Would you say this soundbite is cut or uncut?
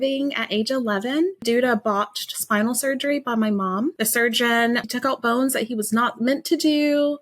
cut